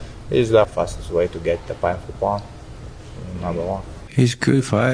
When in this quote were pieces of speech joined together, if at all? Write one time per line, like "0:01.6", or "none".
0:04.0